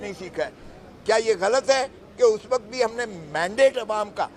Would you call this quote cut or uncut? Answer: uncut